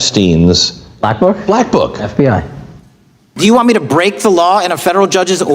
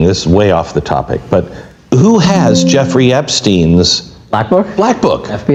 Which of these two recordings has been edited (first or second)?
first